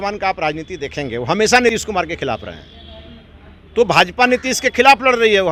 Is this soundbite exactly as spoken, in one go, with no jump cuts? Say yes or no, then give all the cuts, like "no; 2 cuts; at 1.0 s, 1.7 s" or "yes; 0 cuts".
yes; 0 cuts